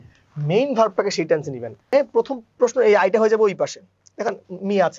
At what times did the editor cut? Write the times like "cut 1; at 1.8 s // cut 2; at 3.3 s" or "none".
cut 1; at 1.9 s